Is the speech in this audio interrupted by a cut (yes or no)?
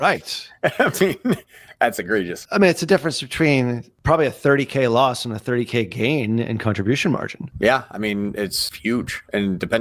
yes